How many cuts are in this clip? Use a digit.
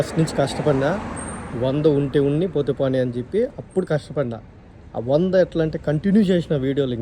0